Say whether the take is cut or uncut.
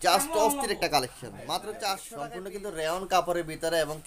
cut